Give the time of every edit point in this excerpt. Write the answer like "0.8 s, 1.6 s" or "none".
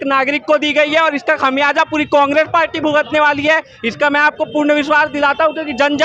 none